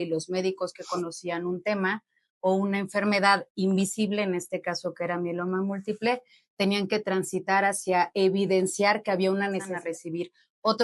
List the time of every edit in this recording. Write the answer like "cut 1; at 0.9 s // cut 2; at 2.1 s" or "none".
cut 1; at 9.7 s